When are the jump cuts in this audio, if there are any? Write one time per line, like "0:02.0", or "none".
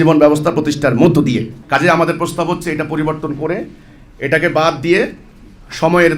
0:01.5